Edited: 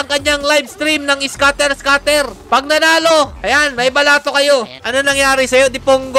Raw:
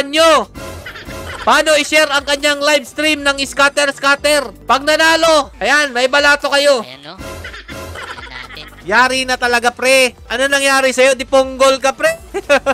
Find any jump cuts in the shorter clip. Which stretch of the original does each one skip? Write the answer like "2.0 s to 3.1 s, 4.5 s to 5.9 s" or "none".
7.0 s to 10.2 s